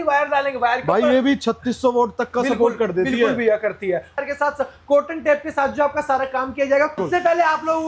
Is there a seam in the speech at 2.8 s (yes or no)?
no